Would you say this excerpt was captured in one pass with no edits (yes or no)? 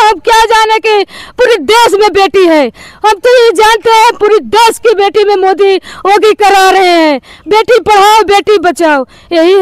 yes